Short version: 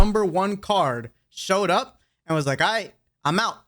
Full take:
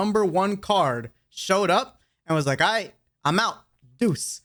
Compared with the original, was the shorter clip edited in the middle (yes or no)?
no